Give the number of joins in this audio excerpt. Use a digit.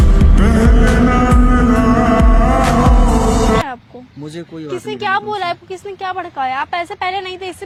0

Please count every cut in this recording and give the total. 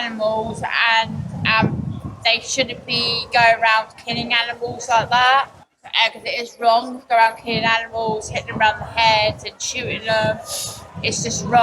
1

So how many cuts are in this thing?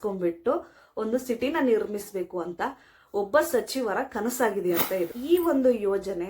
1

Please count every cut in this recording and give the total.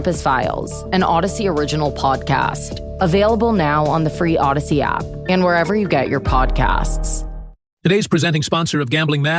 1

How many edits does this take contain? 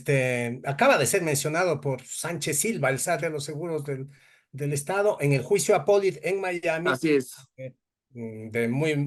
0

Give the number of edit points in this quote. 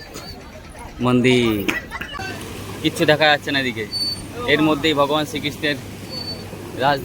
1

